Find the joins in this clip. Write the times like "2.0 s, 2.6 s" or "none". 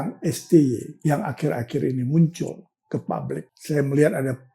0.9 s, 3.5 s